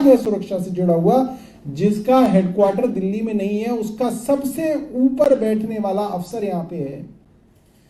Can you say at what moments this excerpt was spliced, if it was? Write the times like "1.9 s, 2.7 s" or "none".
none